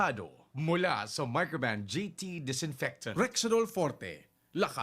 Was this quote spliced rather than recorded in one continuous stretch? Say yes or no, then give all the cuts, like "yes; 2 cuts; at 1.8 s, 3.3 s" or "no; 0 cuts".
yes; 1 cut; at 3.1 s